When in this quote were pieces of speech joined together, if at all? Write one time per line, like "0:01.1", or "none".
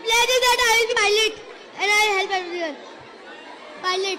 0:00.9